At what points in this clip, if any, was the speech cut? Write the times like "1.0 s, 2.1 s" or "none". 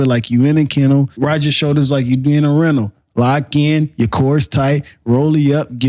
1.1 s